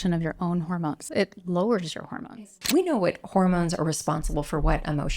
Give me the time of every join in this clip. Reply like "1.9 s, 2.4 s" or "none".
1.0 s, 2.6 s